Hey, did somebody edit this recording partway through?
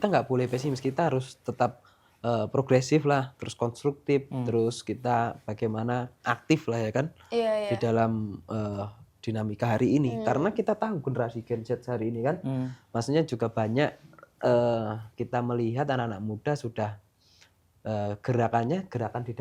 no; 0 cuts

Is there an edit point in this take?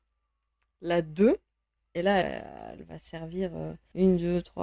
yes; 1 cut; at 1.9 s

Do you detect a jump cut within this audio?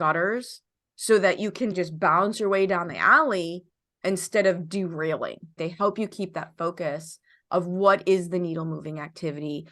yes; 2 cuts; at 1.7 s, 5.6 s

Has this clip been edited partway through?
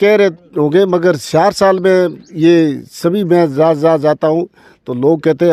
no; 0 cuts

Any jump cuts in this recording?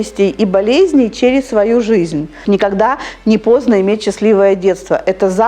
yes; 1 cut; at 2.4 s

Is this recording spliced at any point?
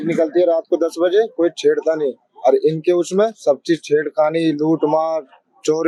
no; 0 cuts

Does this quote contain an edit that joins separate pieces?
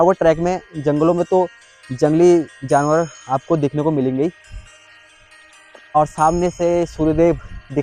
no; 0 cuts

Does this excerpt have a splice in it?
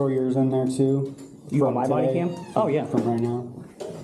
no; 0 cuts

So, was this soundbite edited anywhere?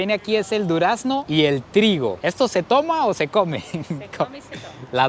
no; 0 cuts

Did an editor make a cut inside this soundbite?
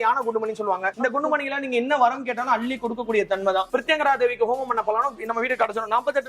yes; 1 cut; at 3.7 s

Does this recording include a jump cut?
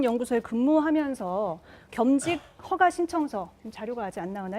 yes; 1 cut; at 3.1 s

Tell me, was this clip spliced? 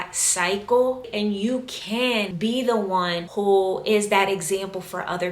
yes; 2 cuts; at 2.3 s, 3.2 s

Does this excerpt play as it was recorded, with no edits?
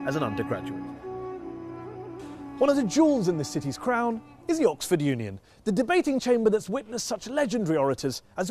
no; 1 cut; at 5.2 s

